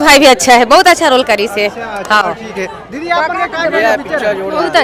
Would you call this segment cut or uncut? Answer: uncut